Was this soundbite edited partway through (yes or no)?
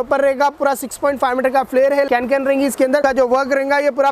yes